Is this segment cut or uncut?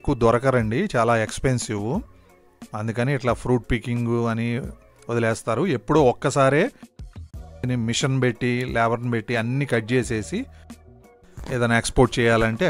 uncut